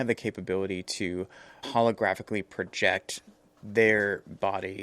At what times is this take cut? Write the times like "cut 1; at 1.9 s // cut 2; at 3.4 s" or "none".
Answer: cut 1; at 1.7 s